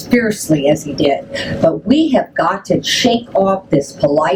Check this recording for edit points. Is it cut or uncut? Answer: uncut